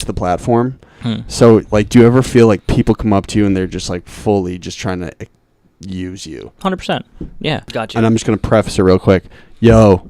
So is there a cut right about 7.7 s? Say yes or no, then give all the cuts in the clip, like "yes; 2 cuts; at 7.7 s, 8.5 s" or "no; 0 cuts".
yes; 1 cut; at 7.7 s